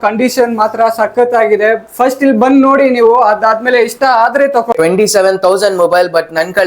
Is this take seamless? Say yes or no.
no